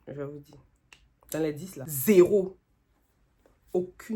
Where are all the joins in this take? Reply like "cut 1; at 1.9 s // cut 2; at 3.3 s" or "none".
cut 1; at 1.8 s